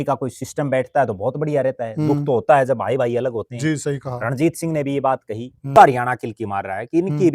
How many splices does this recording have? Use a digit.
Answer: 1